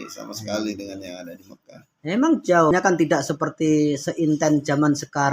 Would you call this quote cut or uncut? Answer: cut